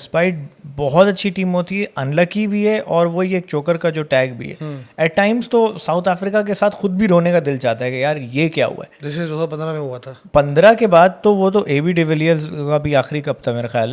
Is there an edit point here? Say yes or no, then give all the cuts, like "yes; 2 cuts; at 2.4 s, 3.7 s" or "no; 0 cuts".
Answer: no; 0 cuts